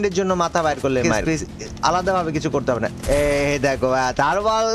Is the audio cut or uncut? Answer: cut